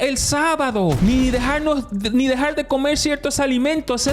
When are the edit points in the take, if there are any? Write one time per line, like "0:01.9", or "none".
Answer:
0:01.0

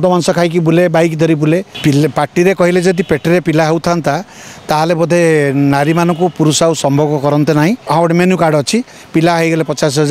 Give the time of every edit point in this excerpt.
0:01.7
0:07.8

